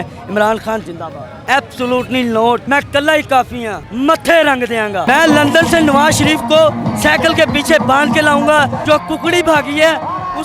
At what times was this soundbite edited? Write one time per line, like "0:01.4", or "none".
0:01.4
0:05.1
0:08.8